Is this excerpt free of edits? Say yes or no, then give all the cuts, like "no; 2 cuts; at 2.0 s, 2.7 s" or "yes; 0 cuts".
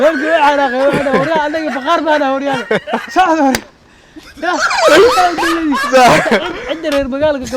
yes; 0 cuts